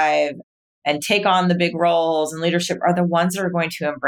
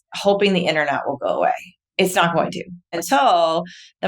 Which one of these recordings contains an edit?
second; 2 cuts; at 1.8 s, 2.9 s

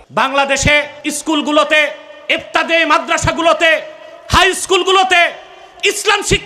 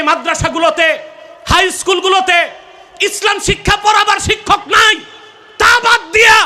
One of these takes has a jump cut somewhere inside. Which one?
first; 1 cut; at 1.0 s

